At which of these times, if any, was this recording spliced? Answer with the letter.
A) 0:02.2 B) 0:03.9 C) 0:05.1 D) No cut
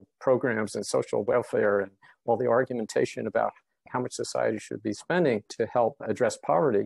B